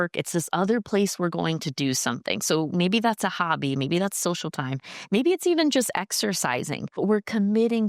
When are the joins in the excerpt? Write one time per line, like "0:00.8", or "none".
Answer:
0:06.8

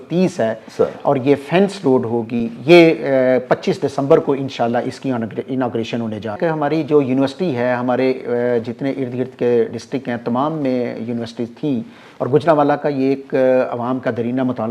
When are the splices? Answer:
0:06.4

